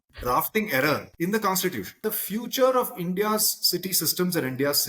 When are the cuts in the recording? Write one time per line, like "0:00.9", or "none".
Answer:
0:01.1
0:02.0